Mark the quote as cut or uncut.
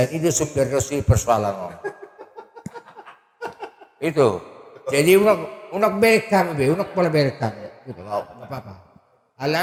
uncut